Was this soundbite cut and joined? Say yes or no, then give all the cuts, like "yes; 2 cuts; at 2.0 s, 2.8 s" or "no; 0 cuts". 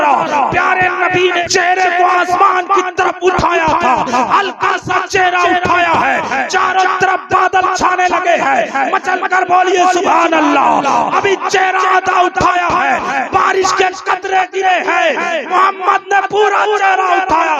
yes; 1 cut; at 1.4 s